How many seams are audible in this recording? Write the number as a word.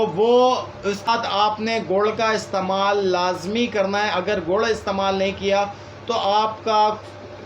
one